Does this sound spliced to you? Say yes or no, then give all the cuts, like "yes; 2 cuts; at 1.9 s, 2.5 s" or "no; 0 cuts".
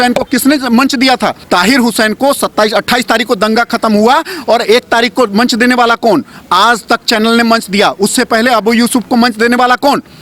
yes; 1 cut; at 1.4 s